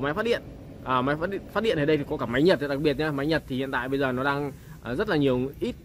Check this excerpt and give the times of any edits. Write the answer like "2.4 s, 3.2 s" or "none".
none